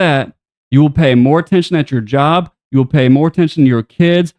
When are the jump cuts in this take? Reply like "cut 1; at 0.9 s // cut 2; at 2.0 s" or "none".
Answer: none

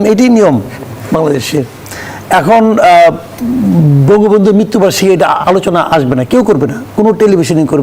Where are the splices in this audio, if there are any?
none

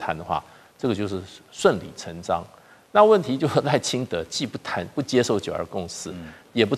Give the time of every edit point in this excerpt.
none

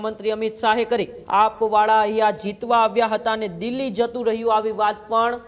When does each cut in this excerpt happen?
cut 1; at 1.2 s

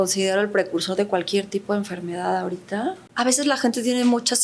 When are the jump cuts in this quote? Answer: cut 1; at 3.0 s

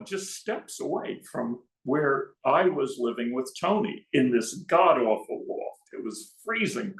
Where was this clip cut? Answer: none

